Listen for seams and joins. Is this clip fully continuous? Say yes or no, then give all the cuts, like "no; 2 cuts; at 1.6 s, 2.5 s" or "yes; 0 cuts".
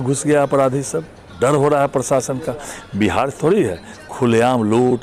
yes; 0 cuts